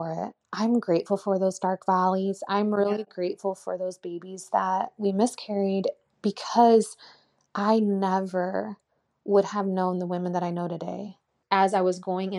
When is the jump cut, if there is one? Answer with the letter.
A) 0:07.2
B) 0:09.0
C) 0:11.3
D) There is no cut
C